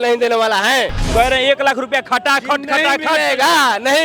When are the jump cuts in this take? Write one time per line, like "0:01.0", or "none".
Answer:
0:01.0